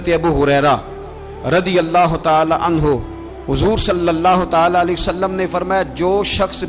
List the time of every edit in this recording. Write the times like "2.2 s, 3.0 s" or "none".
none